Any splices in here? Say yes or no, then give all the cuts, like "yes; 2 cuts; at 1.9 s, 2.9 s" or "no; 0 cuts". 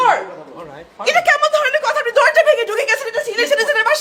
no; 0 cuts